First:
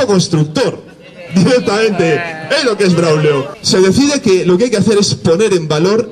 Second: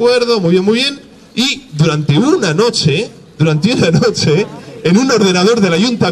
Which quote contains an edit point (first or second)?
first